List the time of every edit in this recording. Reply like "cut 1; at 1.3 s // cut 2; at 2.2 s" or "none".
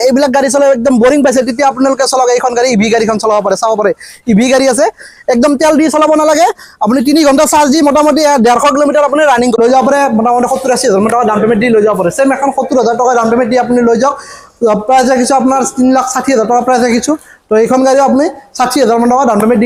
cut 1; at 9.6 s